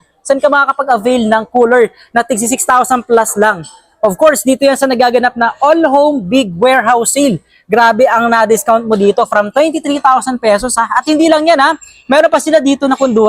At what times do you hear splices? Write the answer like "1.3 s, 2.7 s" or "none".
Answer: none